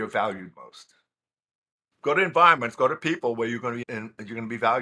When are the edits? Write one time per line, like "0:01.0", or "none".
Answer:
0:03.8